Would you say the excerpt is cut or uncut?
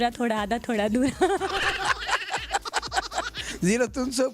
uncut